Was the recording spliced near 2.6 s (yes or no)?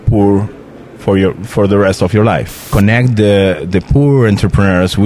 yes